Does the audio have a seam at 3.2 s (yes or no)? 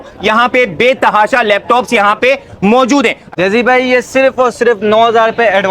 yes